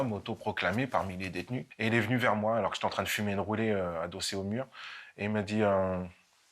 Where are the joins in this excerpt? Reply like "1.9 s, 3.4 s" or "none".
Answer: 1.7 s

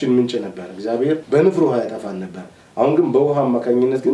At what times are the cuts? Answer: 1.2 s

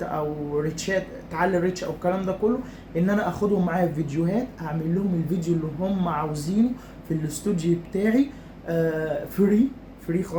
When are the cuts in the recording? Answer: none

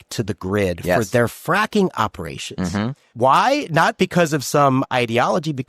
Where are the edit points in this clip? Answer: 3.1 s

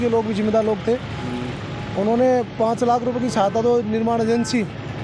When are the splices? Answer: none

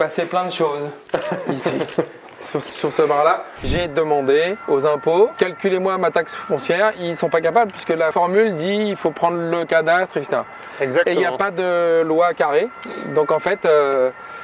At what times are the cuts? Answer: 3.7 s, 4.6 s, 5.3 s, 7.0 s, 8.1 s

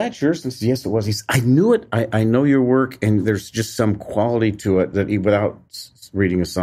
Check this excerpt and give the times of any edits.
none

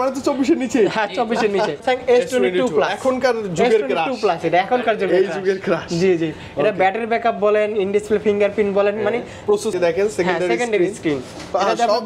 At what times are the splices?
1.8 s, 9.7 s

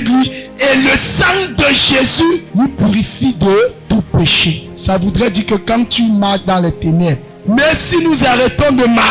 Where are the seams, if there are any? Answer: 2.5 s, 3.8 s, 4.7 s, 7.3 s

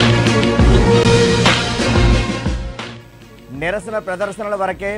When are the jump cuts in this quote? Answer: 0.9 s

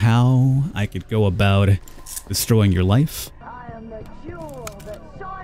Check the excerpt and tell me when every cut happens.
3.4 s

